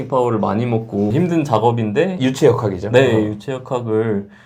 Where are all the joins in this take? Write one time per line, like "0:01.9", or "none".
none